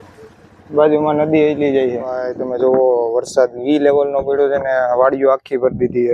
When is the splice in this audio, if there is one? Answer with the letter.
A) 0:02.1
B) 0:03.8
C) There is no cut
A